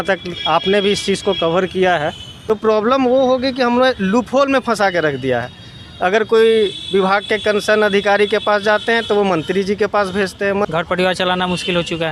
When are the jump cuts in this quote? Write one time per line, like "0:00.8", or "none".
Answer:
0:02.3
0:10.7